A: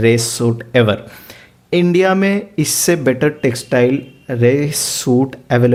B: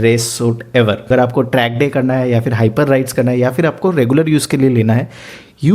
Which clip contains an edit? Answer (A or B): B